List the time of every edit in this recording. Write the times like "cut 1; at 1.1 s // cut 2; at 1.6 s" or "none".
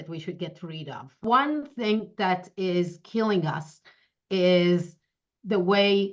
cut 1; at 1.2 s